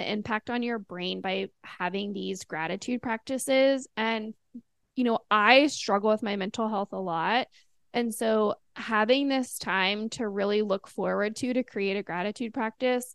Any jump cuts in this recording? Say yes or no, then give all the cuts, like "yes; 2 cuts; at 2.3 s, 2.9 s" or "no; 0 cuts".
no; 0 cuts